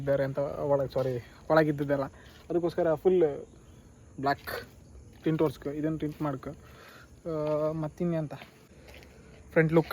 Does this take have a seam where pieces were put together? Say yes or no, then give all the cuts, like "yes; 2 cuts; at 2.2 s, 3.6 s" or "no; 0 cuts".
no; 0 cuts